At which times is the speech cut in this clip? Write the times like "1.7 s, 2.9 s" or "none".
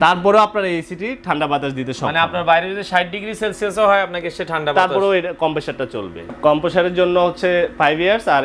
6.3 s